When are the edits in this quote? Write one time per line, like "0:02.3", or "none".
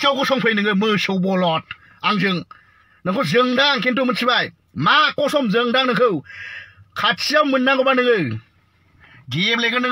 none